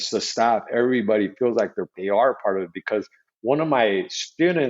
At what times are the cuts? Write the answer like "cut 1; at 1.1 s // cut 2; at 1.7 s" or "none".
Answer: cut 1; at 1.9 s